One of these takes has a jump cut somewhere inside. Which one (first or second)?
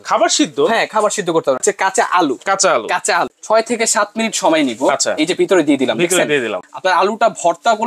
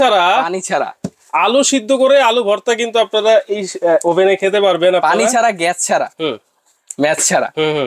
first